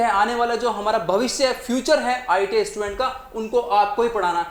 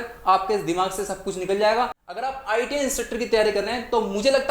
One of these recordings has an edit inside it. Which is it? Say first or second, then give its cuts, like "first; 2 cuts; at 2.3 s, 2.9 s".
second; 1 cut; at 2.0 s